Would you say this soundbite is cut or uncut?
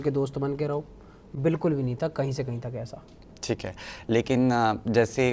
uncut